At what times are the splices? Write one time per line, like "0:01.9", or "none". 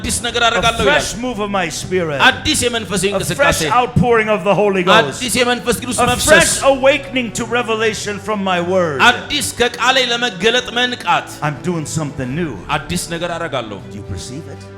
none